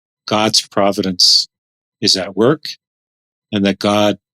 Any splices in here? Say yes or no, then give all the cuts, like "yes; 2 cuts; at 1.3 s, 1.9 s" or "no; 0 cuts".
no; 0 cuts